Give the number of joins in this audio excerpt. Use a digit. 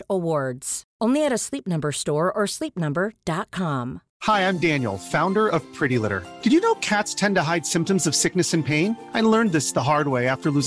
1